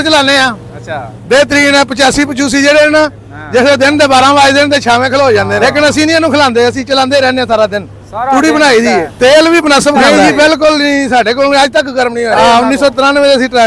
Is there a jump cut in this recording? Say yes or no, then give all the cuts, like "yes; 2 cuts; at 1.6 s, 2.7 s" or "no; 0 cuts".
yes; 4 cuts; at 5.5 s, 9.0 s, 10.0 s, 12.3 s